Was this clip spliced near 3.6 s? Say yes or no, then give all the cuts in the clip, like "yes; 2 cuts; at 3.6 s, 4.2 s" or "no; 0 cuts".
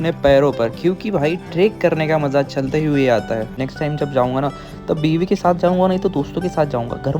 yes; 1 cut; at 3.6 s